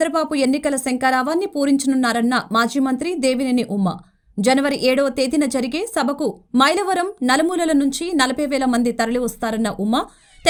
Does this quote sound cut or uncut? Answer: uncut